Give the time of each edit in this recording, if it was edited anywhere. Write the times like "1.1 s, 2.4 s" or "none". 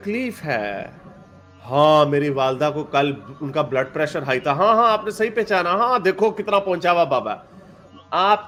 none